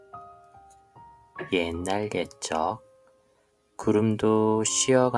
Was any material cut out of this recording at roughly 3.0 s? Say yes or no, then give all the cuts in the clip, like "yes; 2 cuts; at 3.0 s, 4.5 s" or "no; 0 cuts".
no; 1 cut; at 1.3 s